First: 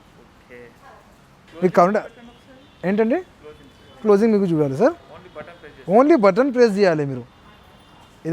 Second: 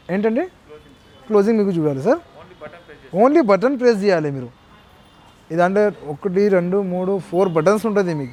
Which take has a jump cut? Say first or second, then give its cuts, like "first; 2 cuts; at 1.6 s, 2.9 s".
first; 1 cut; at 1.5 s